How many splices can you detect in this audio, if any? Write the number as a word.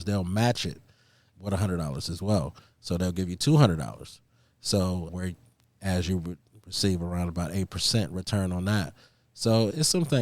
one